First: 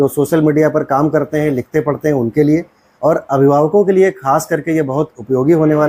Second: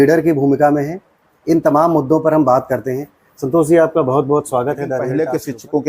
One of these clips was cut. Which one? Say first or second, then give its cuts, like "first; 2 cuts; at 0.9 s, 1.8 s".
second; 1 cut; at 5.0 s